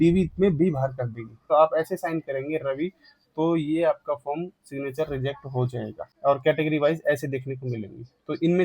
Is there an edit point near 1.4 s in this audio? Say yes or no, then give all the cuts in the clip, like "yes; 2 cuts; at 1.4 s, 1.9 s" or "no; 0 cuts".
yes; 2 cuts; at 1.4 s, 6.0 s